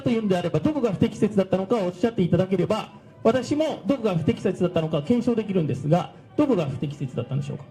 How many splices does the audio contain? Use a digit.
0